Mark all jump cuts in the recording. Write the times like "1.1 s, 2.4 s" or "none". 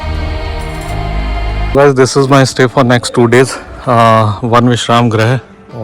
1.7 s